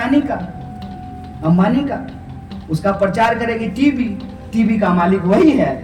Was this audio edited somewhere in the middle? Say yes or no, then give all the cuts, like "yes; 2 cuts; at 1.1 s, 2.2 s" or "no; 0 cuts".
no; 0 cuts